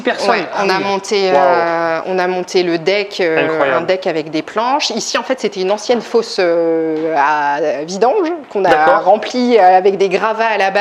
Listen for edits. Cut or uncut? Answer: uncut